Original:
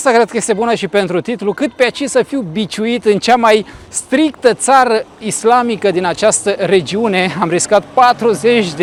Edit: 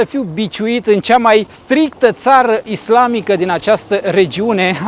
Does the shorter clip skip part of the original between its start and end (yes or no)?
yes